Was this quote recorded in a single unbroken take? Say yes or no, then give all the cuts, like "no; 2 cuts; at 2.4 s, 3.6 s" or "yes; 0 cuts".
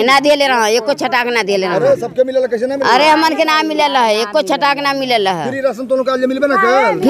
yes; 0 cuts